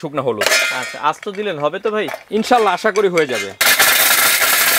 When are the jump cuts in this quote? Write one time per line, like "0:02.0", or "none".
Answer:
0:03.6